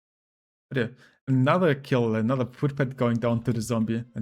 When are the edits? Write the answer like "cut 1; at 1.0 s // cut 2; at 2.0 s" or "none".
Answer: none